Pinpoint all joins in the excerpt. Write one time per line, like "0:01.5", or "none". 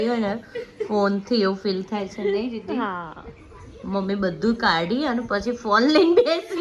none